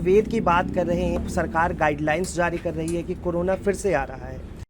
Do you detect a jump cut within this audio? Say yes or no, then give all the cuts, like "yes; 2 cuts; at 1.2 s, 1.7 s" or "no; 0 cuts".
yes; 1 cut; at 1.2 s